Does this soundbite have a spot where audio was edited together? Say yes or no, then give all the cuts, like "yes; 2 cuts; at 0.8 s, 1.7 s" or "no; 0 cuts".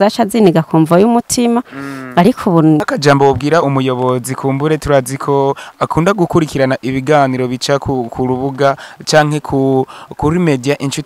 yes; 1 cut; at 2.8 s